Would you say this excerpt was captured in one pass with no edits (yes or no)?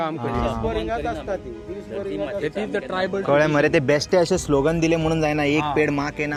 yes